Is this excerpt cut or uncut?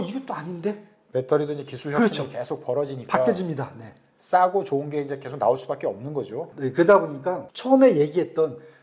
cut